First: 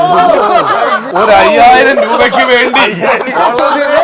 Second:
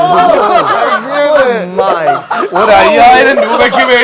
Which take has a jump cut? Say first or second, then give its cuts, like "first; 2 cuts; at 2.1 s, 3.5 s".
first; 2 cuts; at 1.1 s, 3.3 s